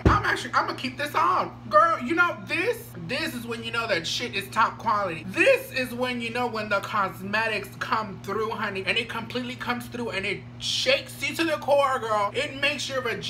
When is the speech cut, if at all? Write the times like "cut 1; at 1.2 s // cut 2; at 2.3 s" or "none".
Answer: cut 1; at 8.8 s